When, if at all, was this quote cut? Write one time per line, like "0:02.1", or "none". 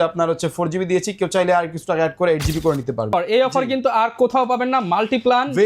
0:03.1